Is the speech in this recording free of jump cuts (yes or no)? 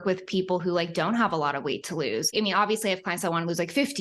no